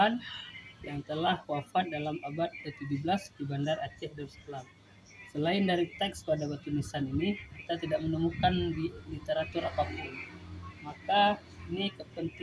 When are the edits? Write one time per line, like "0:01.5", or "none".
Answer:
none